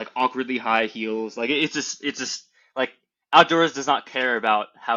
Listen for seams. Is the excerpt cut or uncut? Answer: uncut